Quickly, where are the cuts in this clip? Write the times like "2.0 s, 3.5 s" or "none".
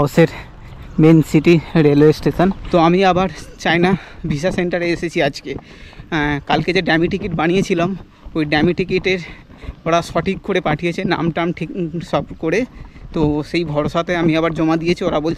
2.7 s